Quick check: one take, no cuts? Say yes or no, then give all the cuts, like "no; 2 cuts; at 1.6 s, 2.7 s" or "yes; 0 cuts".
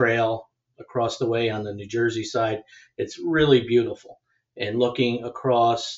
yes; 0 cuts